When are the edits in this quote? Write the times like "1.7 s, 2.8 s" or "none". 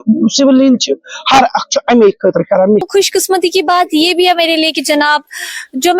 2.9 s